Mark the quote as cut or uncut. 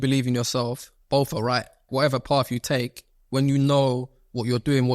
cut